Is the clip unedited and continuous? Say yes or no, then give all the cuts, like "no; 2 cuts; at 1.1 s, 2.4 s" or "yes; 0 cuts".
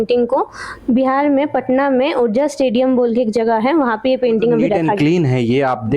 no; 1 cut; at 4.9 s